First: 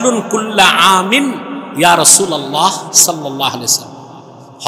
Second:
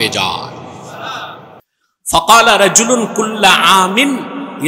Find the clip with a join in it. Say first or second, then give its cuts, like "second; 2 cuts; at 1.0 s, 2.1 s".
second; 1 cut; at 1.7 s